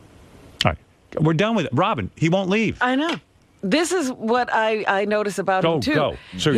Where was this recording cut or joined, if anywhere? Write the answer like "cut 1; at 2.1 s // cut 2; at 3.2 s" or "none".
none